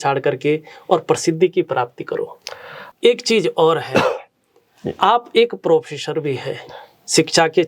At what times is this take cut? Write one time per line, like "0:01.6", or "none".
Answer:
0:02.8

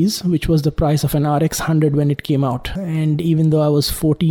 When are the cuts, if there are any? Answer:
0:02.7

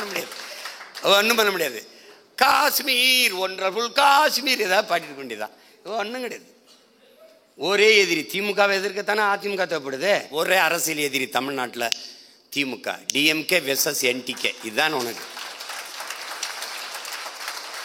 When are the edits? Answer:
0:10.3

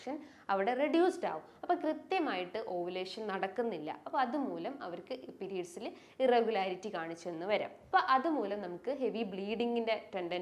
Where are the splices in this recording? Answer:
0:07.8

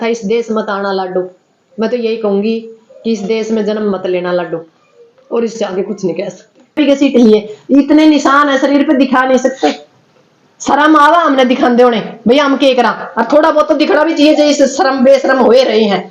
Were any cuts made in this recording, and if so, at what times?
0:06.8

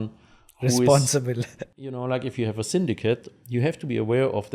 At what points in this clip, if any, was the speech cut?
0:01.6

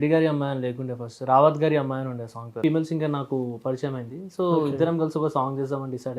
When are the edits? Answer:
0:02.6

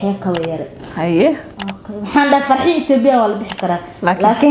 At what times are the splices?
none

